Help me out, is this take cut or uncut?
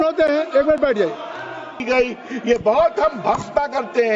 cut